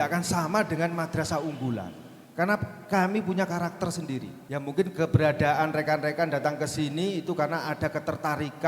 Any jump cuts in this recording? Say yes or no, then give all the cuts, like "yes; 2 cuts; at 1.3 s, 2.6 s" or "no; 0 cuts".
yes; 1 cut; at 4.4 s